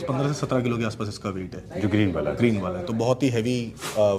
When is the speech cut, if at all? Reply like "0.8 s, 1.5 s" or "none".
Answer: none